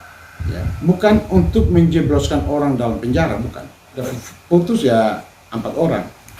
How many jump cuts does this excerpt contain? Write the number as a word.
one